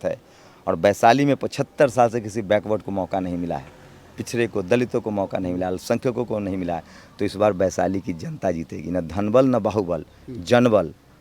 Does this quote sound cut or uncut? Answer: uncut